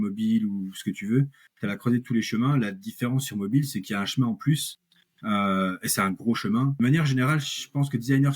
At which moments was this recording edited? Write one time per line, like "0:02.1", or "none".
0:06.7